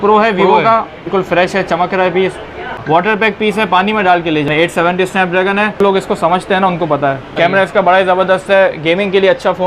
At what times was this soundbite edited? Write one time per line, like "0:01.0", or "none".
0:01.1
0:02.7
0:04.5
0:05.8
0:07.3